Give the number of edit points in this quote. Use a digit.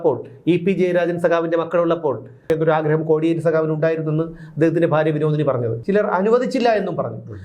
2